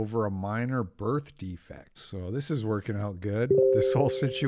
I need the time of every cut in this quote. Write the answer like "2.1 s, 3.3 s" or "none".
2.0 s